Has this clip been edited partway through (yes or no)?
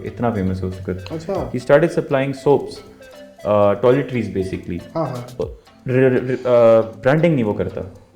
no